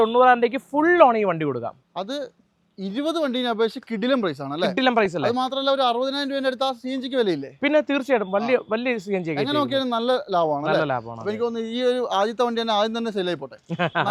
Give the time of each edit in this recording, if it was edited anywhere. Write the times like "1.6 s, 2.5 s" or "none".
none

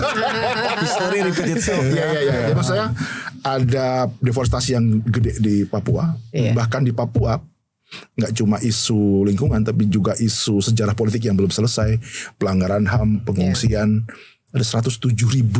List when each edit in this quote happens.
none

